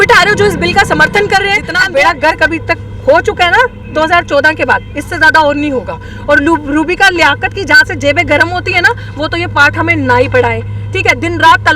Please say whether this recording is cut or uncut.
cut